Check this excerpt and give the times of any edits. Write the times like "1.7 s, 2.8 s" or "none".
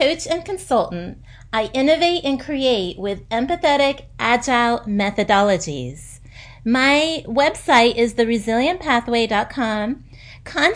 none